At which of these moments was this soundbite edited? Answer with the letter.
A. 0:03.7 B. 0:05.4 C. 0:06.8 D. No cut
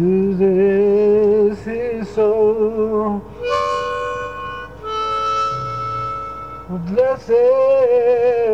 C